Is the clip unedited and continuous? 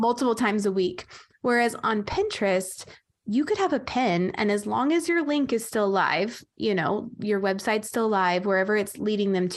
yes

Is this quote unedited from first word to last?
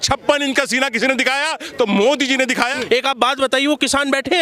no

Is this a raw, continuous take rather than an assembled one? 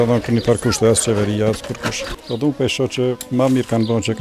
no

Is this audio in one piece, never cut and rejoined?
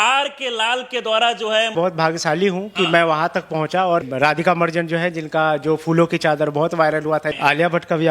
no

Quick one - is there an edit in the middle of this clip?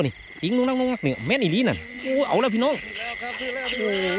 no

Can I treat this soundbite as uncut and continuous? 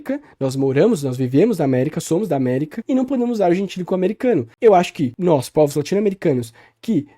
no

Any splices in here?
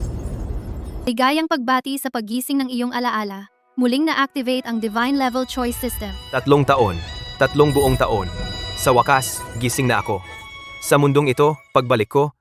yes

